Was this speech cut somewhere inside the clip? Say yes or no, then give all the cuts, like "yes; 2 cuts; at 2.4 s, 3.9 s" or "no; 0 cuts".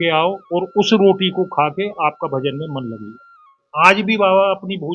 yes; 1 cut; at 3.6 s